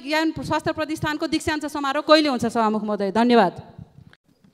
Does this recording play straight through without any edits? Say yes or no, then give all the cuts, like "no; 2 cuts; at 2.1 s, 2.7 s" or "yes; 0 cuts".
yes; 0 cuts